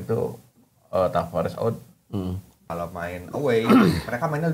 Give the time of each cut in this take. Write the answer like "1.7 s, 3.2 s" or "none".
2.5 s